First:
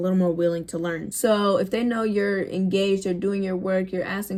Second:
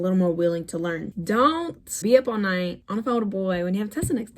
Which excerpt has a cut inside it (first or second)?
second